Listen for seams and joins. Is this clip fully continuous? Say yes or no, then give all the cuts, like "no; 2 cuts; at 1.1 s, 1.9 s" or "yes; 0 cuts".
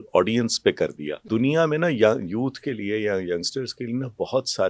no; 1 cut; at 1.1 s